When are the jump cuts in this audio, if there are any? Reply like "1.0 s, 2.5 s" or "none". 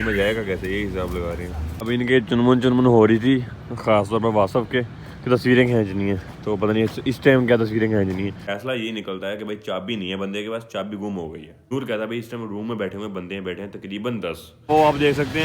1.7 s, 8.4 s, 11.7 s, 14.5 s